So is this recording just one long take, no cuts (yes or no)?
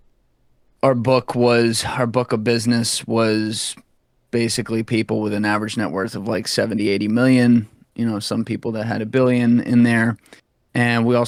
yes